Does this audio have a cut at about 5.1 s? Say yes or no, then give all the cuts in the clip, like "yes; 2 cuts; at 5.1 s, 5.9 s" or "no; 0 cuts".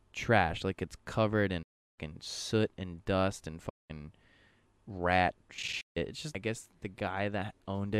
no; 1 cut; at 6.4 s